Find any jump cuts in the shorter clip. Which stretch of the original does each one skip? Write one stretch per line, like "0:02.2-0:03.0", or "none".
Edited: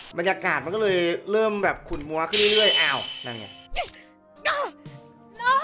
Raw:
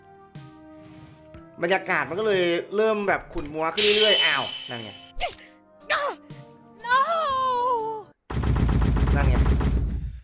none